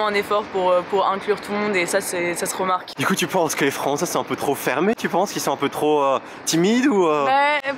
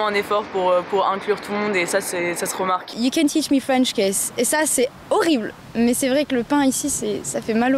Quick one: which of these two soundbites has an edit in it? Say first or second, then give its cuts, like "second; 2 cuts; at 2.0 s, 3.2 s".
second; 2 cuts; at 2.9 s, 5.6 s